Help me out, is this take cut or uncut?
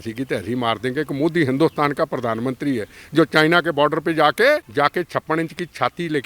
cut